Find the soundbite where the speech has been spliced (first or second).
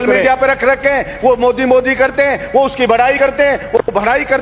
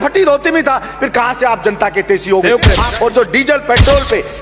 second